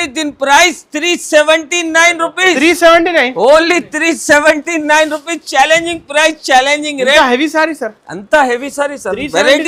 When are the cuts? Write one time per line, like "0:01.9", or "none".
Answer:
none